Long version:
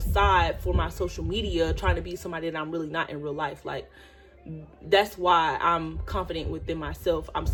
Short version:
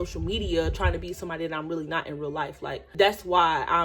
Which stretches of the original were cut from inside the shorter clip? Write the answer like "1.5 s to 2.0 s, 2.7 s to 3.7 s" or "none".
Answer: 3.9 s to 4.8 s